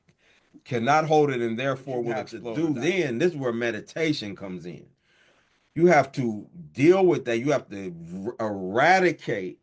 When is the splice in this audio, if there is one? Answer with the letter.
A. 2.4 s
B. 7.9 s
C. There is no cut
A